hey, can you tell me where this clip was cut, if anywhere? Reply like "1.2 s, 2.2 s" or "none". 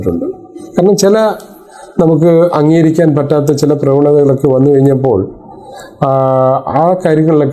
none